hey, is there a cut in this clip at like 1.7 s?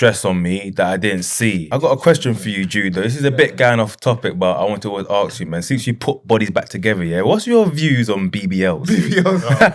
yes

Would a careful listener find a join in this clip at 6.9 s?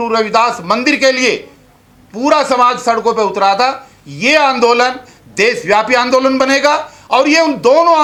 no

